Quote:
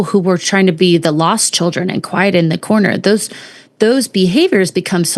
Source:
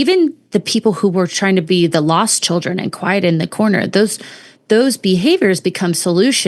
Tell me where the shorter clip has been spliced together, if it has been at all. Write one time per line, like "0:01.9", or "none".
none